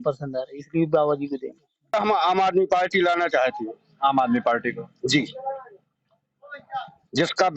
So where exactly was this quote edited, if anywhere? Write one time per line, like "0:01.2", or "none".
0:01.8

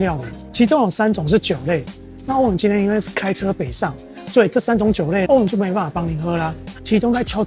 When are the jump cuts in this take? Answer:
none

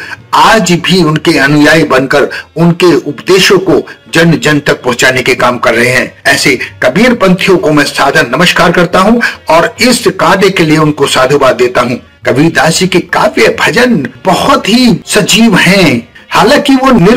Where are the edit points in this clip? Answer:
0:12.1

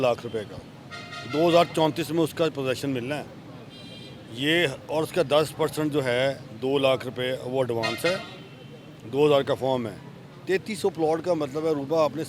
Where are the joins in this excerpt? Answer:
none

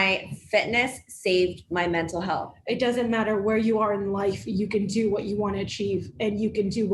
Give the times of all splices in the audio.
0:02.5

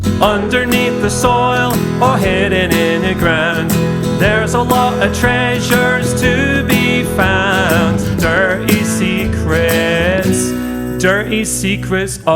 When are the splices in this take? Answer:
none

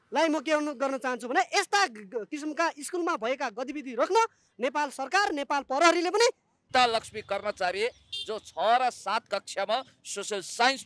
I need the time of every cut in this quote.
0:06.5

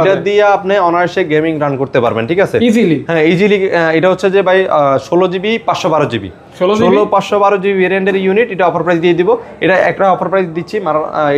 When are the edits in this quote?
none

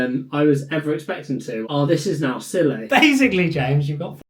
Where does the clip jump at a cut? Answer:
0:01.6
0:02.8

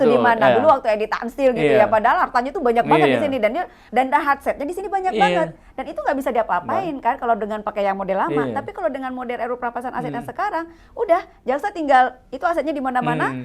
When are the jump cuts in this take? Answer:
0:03.8

